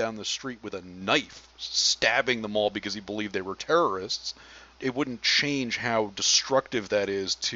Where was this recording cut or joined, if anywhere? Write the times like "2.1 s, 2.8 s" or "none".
4.7 s